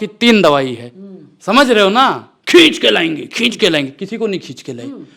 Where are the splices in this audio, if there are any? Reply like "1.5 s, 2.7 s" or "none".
2.3 s